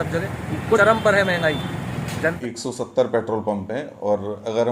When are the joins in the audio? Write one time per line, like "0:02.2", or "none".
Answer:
0:02.4